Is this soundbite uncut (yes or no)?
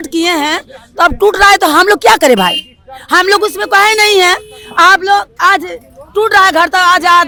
yes